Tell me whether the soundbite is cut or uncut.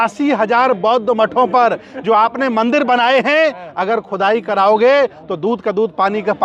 uncut